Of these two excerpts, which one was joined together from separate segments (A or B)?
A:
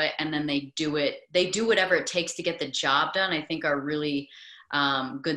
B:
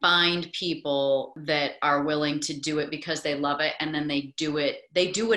B